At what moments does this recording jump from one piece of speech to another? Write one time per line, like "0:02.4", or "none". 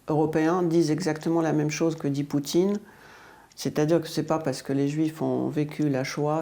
none